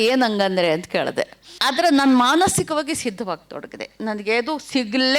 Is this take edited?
yes; 1 cut; at 1.5 s

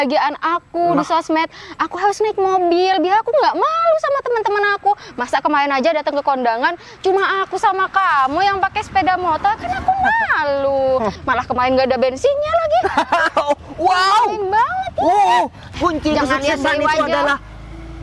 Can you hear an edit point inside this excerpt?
yes; 2 cuts; at 11.2 s, 15.7 s

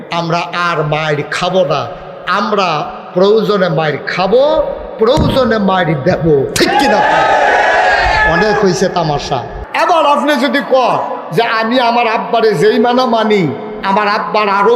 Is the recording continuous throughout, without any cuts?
no; 1 cut; at 9.6 s

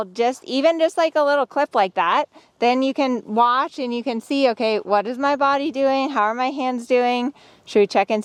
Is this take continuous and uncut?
yes; 0 cuts

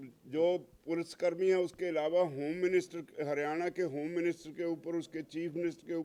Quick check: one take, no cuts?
yes; 0 cuts

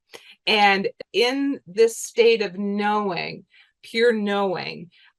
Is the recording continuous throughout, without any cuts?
no; 1 cut; at 1.0 s

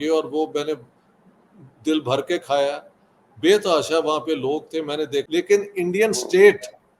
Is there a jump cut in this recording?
yes; 1 cut; at 5.3 s

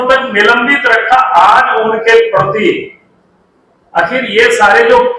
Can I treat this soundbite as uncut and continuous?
yes; 0 cuts

